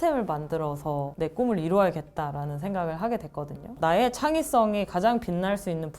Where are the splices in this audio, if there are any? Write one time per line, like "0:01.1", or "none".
0:03.7